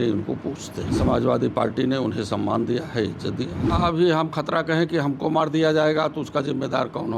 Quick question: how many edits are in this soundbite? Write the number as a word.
two